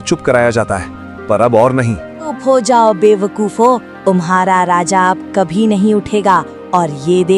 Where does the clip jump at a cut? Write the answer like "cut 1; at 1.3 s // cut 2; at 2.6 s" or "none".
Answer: cut 1; at 2.4 s